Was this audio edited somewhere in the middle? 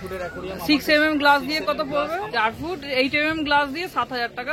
yes; 1 cut; at 2.3 s

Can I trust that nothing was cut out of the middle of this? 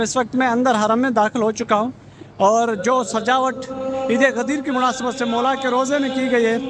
yes; 0 cuts

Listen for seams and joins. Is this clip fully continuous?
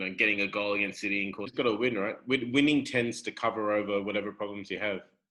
no; 1 cut; at 1.5 s

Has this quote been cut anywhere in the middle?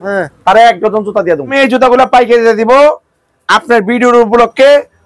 yes; 1 cut; at 1.5 s

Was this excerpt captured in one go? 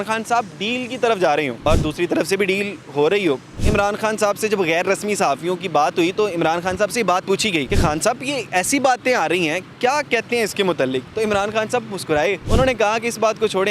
no; 4 cuts; at 1.6 s, 3.5 s, 7.7 s, 12.4 s

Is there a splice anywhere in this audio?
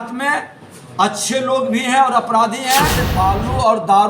yes; 1 cut; at 3.0 s

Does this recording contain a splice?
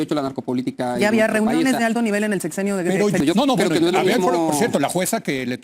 yes; 1 cut; at 3.2 s

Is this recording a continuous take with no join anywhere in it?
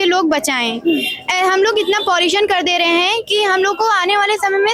yes; 0 cuts

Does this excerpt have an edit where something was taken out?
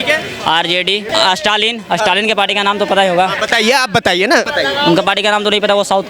yes; 2 cuts; at 1.1 s, 4.5 s

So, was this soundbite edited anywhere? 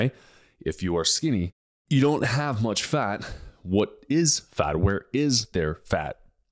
no; 0 cuts

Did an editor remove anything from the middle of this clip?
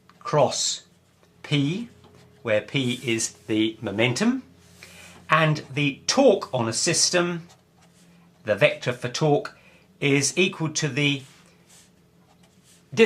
yes; 1 cut; at 1.9 s

